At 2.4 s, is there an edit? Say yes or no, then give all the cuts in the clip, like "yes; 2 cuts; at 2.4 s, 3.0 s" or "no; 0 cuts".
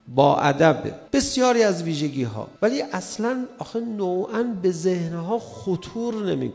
yes; 2 cuts; at 0.9 s, 2.4 s